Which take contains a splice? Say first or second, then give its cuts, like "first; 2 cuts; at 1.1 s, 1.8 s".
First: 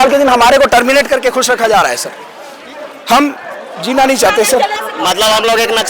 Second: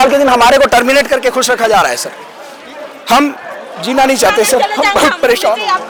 first; 1 cut; at 4.7 s